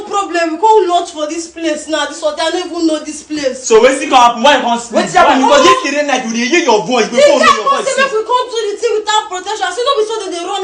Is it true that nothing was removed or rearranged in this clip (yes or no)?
yes